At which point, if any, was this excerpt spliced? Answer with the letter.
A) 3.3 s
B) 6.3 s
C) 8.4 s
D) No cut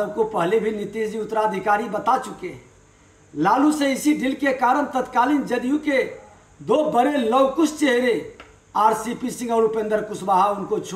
D